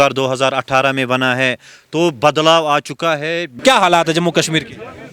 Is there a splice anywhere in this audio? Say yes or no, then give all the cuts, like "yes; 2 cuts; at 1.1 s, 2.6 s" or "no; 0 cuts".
yes; 1 cut; at 3.5 s